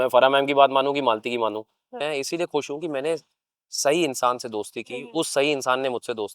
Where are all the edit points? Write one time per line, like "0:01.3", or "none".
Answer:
0:02.0